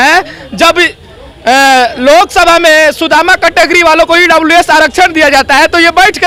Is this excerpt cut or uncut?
uncut